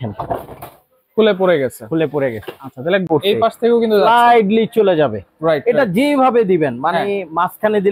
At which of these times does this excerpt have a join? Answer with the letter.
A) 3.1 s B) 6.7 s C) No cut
A